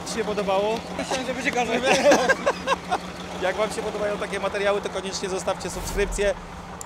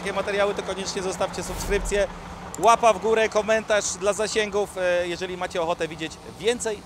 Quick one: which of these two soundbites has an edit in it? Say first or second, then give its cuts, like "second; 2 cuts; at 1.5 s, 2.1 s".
first; 2 cuts; at 1.0 s, 3.2 s